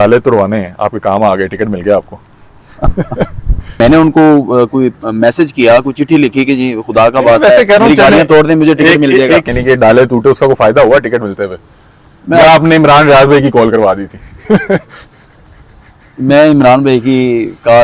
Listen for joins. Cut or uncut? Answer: cut